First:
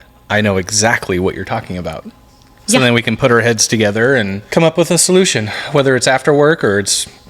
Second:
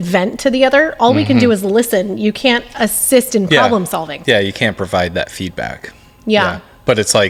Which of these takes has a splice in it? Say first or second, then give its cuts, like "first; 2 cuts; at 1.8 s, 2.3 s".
first; 1 cut; at 4.4 s